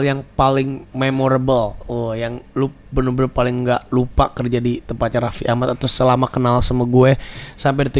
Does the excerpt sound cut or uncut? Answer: uncut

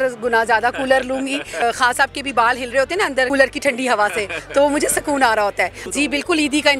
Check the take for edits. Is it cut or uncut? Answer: cut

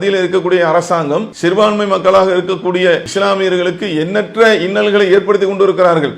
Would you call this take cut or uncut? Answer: cut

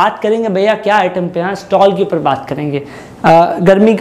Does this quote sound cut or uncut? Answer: uncut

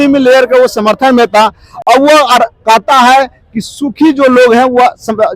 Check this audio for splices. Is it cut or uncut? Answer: uncut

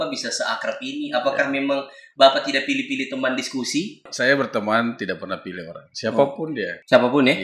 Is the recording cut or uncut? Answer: cut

